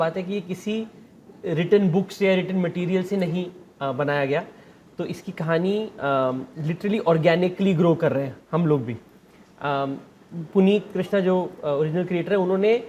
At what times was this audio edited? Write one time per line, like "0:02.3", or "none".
none